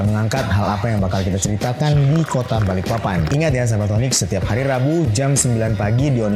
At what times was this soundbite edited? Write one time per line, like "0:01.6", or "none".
none